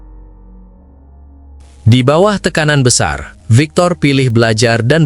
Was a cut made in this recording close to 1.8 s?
yes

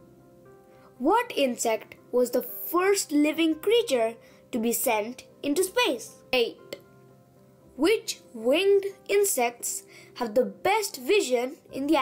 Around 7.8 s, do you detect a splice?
no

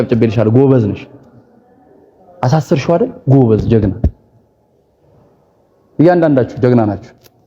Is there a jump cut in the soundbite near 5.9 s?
no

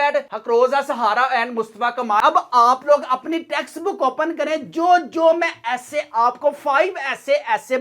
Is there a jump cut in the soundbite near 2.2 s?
yes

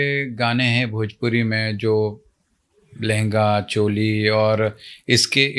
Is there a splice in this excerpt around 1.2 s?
no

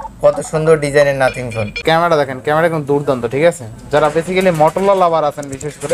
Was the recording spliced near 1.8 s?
yes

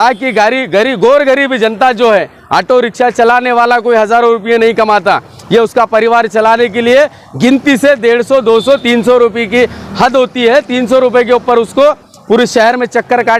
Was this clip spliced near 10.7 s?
no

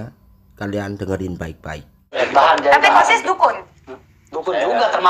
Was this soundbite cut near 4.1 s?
no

